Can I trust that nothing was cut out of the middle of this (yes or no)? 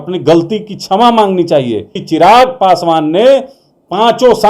no